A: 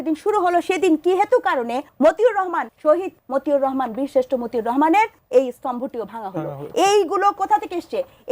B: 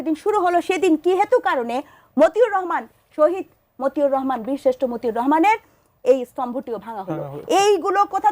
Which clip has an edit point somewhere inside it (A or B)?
A